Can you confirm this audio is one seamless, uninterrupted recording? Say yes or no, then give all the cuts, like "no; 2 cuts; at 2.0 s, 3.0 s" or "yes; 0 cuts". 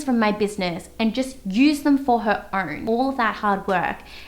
no; 1 cut; at 2.8 s